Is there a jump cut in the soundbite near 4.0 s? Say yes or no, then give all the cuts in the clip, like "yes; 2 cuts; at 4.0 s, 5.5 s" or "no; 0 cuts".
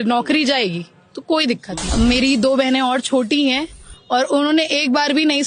no; 1 cut; at 1.8 s